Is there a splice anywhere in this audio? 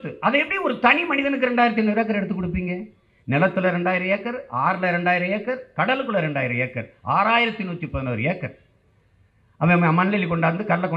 no; 0 cuts

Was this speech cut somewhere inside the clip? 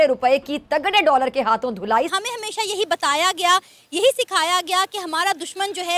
yes; 1 cut; at 2.1 s

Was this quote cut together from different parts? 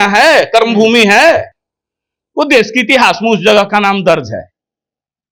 no; 0 cuts

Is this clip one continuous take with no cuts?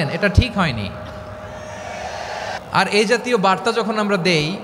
no; 1 cut; at 2.6 s

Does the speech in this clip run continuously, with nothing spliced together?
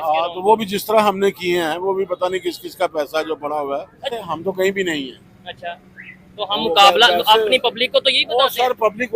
no; 1 cut; at 4.1 s

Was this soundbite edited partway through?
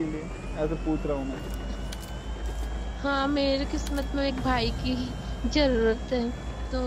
no; 0 cuts

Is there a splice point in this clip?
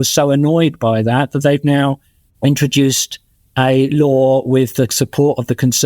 no; 0 cuts

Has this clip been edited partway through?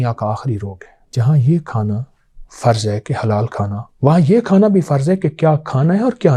yes; 1 cut; at 1.2 s

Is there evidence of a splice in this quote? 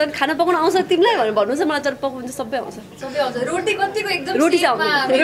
no; 0 cuts

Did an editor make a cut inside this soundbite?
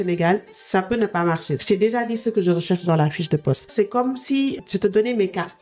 yes; 3 cuts; at 1.6 s, 3.7 s, 4.6 s

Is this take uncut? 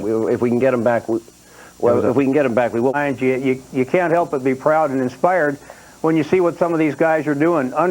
no; 1 cut; at 3.0 s

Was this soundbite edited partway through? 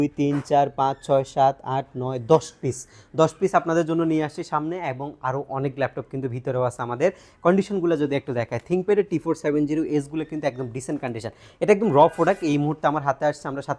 no; 0 cuts

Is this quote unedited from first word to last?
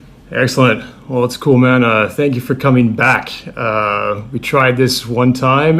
no; 1 cut; at 1.2 s

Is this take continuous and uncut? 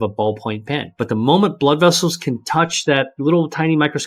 no; 2 cuts; at 0.9 s, 3.2 s

